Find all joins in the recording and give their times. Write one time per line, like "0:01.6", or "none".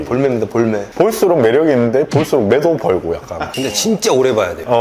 0:00.9
0:03.5

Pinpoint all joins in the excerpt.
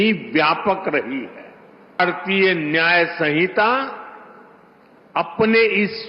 0:02.0

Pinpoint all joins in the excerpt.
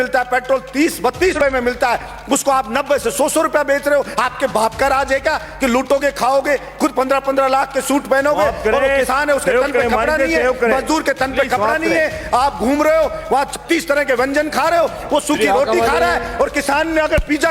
0:01.4

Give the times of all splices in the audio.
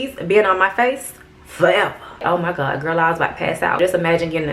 0:02.2
0:03.8

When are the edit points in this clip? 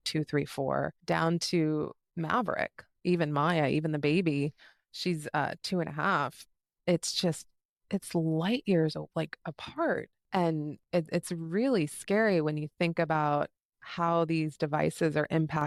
none

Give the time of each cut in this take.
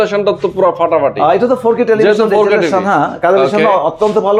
none

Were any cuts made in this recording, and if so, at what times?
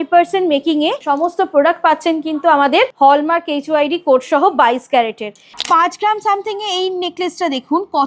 0:01.0
0:02.9
0:05.6

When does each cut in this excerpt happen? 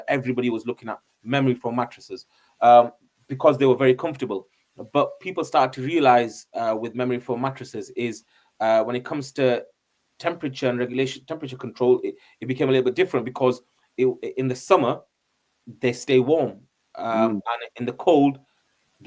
none

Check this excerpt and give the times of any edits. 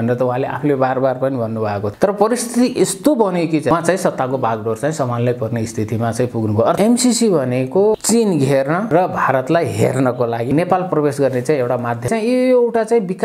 0:01.9
0:03.7
0:06.8
0:07.9
0:08.9
0:10.5
0:12.1

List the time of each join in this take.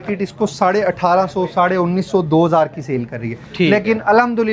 none

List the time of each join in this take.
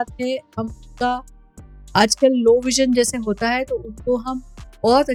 none

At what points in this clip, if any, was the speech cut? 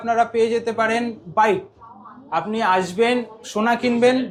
none

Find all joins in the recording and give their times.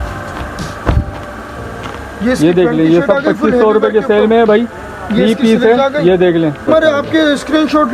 0:06.7

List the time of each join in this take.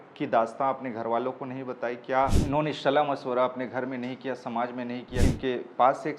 0:02.4
0:05.2

